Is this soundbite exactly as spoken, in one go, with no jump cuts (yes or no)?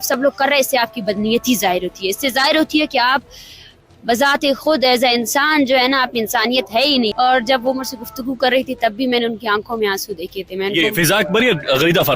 no